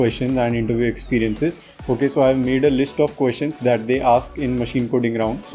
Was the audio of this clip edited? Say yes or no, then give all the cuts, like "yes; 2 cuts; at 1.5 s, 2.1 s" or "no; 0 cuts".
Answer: no; 0 cuts